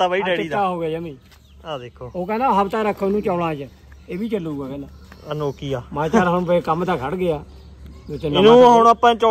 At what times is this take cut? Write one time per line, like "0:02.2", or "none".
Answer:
none